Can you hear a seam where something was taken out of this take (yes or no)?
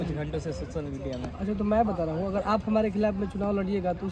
no